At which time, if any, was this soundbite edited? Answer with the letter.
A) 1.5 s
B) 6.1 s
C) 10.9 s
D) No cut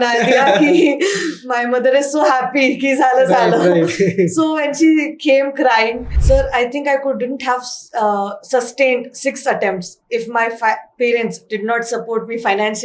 B